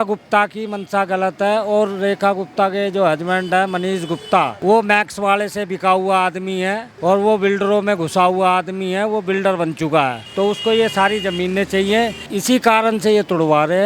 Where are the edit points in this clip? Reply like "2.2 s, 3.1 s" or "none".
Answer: 4.5 s, 6.9 s, 10.2 s, 12.2 s